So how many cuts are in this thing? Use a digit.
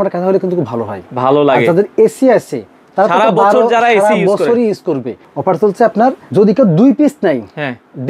2